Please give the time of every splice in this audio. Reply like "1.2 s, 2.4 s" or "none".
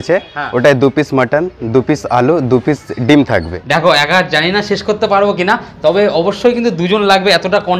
3.6 s